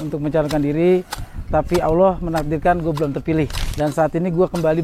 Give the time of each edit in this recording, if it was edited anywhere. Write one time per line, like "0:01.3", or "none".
0:03.6